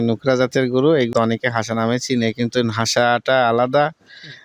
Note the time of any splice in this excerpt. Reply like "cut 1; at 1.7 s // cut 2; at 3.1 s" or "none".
cut 1; at 1.1 s